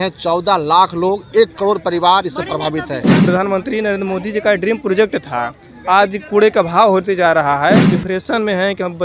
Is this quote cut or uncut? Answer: cut